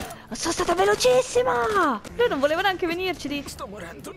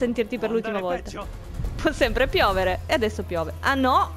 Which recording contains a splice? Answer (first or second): first